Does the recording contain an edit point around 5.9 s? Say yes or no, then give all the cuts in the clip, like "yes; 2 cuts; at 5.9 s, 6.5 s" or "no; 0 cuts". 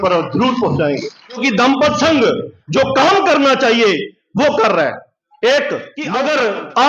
yes; 2 cuts; at 1.4 s, 5.9 s